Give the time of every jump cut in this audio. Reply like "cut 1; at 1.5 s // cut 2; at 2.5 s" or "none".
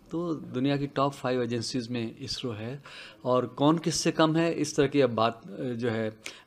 none